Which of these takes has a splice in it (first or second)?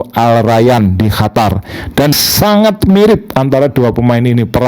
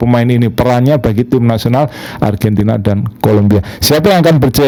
first